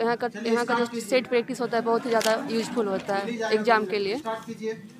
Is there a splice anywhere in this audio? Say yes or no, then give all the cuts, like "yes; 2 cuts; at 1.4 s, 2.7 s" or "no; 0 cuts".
no; 0 cuts